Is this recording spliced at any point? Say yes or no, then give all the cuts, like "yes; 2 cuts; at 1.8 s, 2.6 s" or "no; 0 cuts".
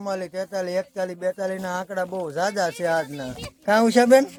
no; 0 cuts